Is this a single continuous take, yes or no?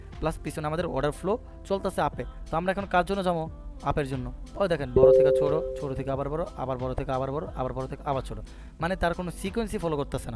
no